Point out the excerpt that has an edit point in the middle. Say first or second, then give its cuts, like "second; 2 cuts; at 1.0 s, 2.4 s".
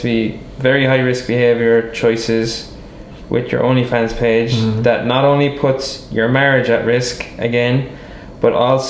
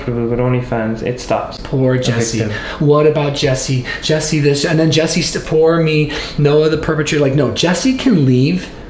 second; 1 cut; at 1.6 s